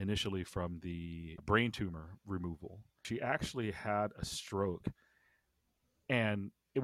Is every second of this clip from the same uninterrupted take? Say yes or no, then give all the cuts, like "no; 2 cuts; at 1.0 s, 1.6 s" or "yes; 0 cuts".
no; 2 cuts; at 1.3 s, 3.0 s